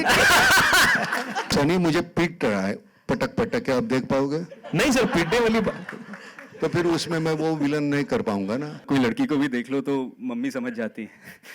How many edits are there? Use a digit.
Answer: 2